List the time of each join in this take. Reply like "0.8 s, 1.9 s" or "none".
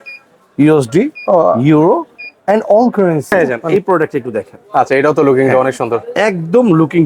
3.6 s